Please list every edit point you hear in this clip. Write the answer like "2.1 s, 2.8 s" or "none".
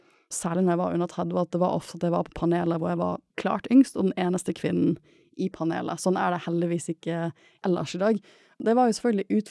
3.3 s, 7.4 s, 8.6 s